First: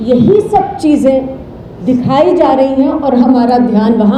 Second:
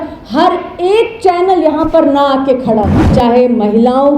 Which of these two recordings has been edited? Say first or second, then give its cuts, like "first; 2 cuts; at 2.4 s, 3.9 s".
second; 1 cut; at 3.0 s